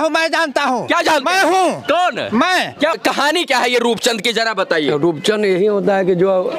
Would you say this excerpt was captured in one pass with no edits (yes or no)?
no